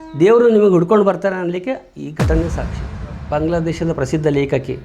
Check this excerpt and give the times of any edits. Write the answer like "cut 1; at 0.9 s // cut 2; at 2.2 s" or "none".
cut 1; at 3.1 s